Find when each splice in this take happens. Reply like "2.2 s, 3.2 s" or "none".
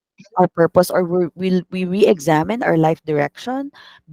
none